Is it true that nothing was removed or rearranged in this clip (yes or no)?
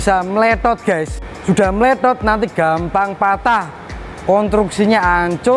yes